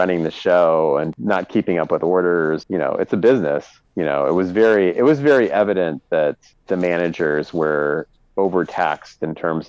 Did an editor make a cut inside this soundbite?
no; 0 cuts

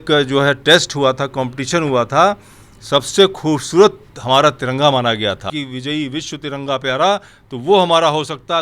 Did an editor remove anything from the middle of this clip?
yes; 1 cut; at 5.5 s

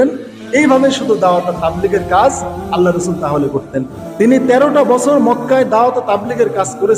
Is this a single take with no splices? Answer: no; 1 cut; at 4.0 s

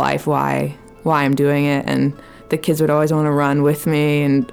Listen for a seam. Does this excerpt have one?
no; 0 cuts

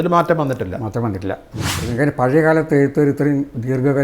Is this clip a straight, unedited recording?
no; 1 cut; at 1.7 s

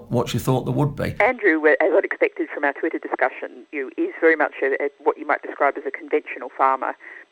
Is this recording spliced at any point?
yes; 1 cut; at 1.1 s

